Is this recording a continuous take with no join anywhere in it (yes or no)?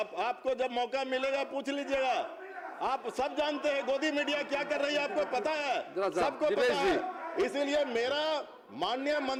yes